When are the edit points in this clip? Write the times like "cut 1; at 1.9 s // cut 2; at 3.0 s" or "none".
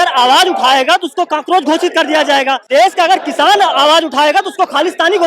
cut 1; at 2.6 s